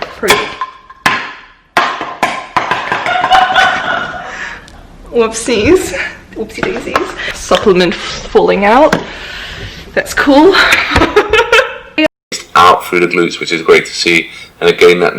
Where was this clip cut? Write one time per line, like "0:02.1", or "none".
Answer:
0:12.3